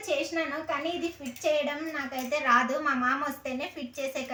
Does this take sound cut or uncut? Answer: uncut